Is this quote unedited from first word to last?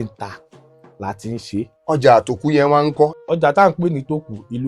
no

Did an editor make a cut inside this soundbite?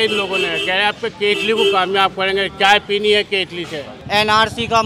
yes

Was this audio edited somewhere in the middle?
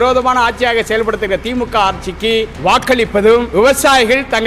yes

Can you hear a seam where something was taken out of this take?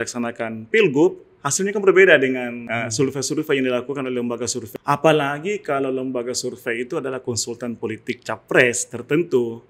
yes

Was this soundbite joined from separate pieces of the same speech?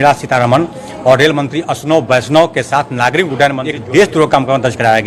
yes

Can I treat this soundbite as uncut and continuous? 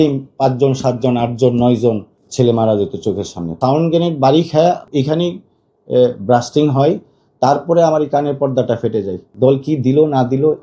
no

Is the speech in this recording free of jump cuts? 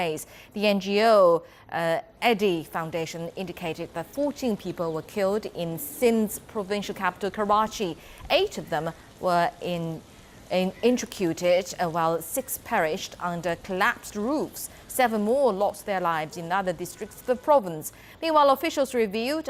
yes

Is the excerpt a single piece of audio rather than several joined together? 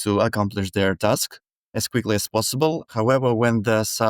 no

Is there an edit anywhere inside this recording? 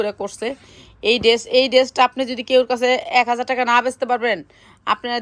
no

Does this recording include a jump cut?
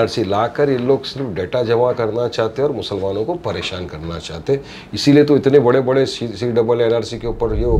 no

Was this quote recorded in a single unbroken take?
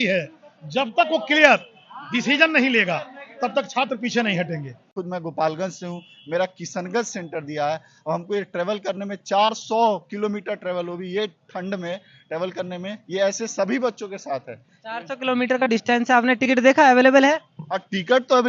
no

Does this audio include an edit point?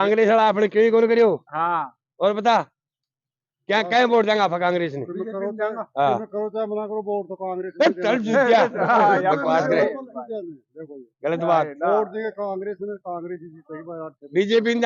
no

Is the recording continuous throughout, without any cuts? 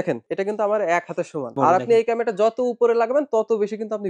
no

